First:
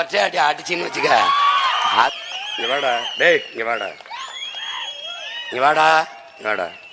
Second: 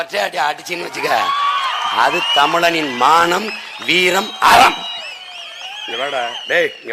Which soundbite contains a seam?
first; 1 cut; at 2.2 s

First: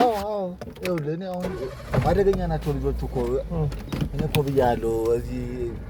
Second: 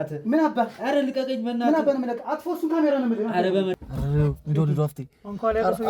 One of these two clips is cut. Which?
second; 1 cut; at 3.8 s

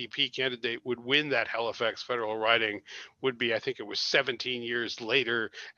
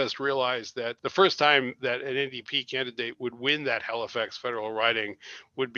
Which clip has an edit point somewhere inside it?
second; 1 cut; at 1.0 s

